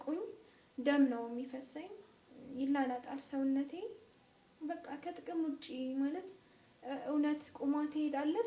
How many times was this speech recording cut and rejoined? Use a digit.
0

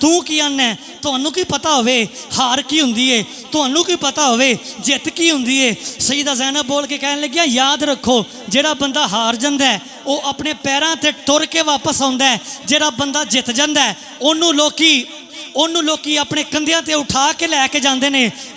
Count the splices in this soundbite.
0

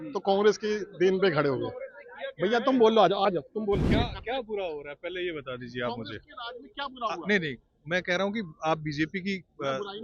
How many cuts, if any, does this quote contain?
1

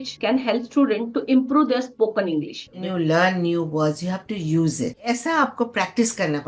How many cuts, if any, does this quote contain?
2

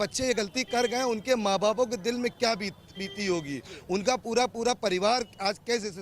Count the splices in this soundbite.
0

